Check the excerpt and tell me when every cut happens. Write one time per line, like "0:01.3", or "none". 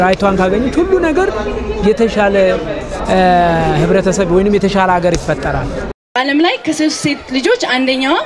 0:05.8